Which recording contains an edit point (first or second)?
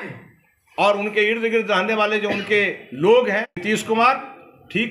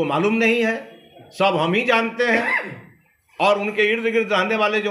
first